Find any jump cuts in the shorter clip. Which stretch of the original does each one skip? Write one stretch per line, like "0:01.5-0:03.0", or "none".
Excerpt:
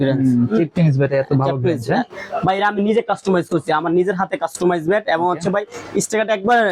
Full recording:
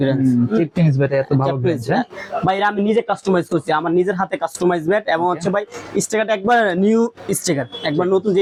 none